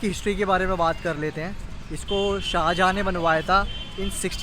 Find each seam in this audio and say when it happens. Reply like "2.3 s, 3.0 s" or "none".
none